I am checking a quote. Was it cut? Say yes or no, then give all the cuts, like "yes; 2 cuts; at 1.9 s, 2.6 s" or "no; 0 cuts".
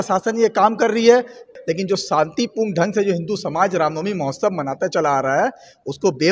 yes; 1 cut; at 1.5 s